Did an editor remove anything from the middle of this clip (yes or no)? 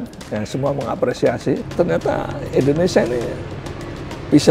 yes